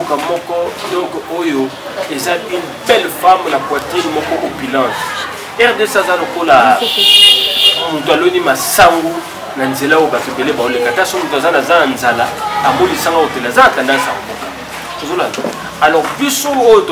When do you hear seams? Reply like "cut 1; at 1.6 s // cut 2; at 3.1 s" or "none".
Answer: none